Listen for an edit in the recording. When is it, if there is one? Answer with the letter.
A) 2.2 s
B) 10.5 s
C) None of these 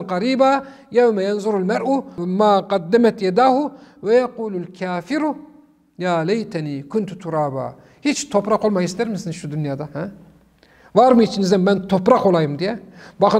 A